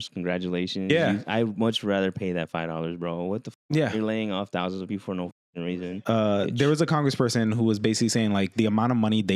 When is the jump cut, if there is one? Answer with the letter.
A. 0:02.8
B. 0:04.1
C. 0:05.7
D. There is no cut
C